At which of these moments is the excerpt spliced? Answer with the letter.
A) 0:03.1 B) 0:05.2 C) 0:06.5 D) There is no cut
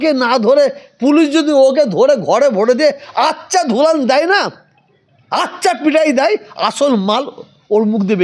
D